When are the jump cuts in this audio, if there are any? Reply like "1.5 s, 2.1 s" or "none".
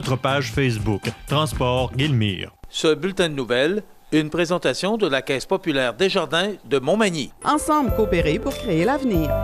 2.6 s